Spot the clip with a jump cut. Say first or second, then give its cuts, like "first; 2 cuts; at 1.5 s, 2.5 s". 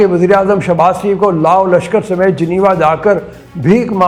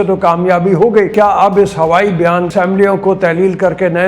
second; 2 cuts; at 1.1 s, 2.5 s